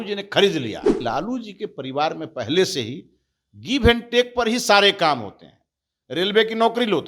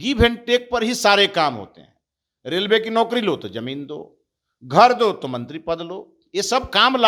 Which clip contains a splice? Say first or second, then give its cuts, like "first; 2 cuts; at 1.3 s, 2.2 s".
first; 1 cut; at 0.9 s